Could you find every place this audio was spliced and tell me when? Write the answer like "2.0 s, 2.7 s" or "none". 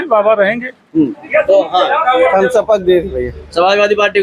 1.2 s